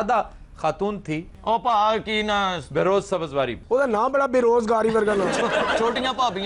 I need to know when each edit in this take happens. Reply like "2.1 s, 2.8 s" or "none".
1.3 s